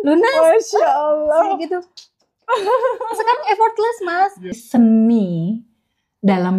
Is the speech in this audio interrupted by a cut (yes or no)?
yes